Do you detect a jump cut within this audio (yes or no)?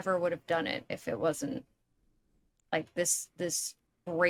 no